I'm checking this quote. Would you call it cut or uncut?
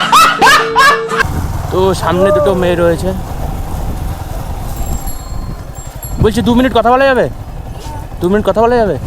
cut